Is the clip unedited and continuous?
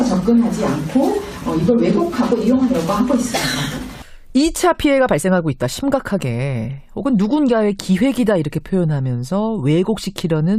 no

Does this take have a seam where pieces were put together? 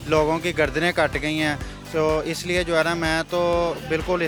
no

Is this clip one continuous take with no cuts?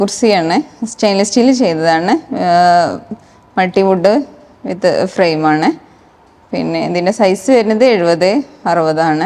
yes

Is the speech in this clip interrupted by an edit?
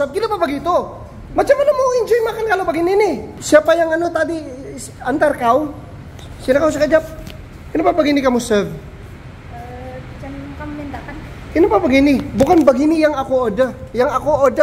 no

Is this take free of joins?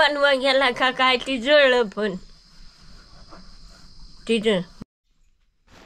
no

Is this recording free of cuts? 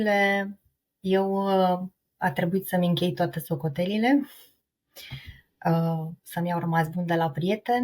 yes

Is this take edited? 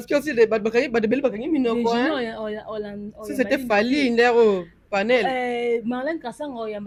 no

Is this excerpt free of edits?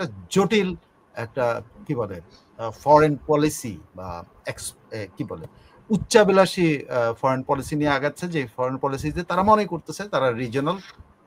yes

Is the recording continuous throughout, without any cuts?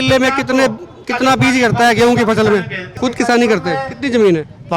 no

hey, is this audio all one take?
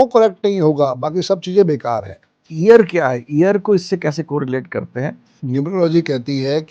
no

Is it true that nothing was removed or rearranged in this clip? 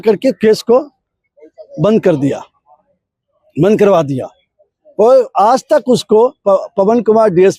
yes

